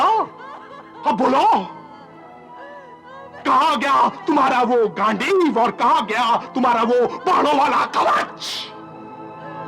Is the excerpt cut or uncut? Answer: uncut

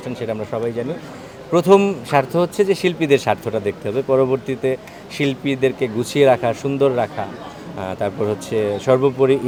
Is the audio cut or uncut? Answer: uncut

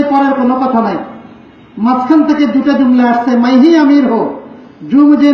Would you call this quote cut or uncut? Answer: uncut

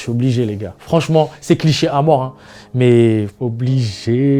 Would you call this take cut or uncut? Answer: cut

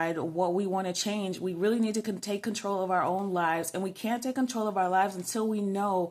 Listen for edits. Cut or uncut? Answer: uncut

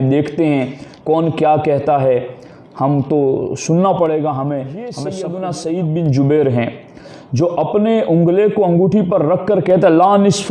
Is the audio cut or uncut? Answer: cut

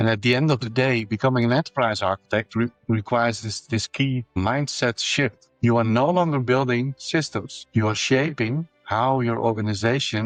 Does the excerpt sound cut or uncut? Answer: uncut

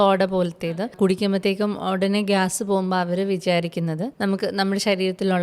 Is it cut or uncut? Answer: cut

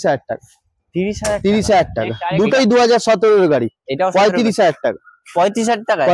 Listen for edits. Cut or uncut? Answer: cut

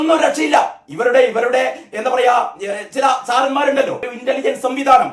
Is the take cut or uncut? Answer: cut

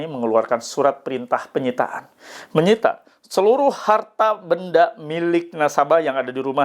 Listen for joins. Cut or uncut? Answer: uncut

